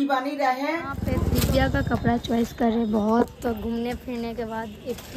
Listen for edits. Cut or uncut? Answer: cut